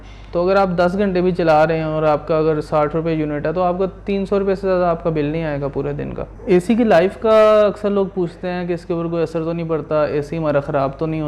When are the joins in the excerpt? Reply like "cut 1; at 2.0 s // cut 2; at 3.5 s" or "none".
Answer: cut 1; at 6.3 s